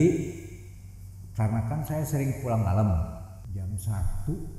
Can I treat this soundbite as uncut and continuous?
no; 1 cut; at 3.3 s

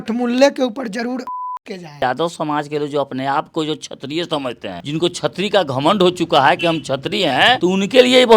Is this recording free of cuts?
no; 3 cuts; at 2.0 s, 4.8 s, 7.6 s

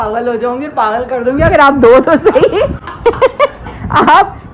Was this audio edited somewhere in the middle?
no; 0 cuts

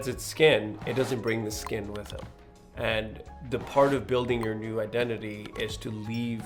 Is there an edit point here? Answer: no; 0 cuts

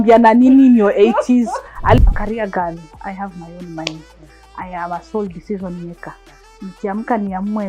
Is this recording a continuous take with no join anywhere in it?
no; 1 cut; at 2.0 s

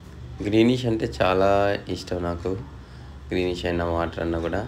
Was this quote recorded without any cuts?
yes; 0 cuts

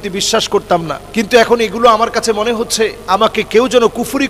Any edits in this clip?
yes; 2 cuts; at 1.0 s, 3.0 s

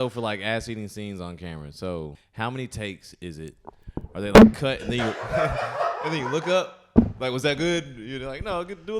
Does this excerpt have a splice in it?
yes; 1 cut; at 2.2 s

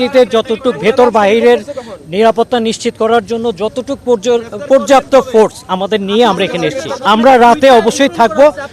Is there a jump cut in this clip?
yes; 1 cut; at 6.9 s

